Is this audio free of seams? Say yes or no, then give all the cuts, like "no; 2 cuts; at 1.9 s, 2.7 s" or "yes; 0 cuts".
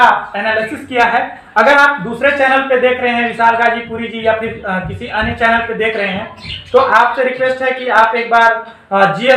yes; 0 cuts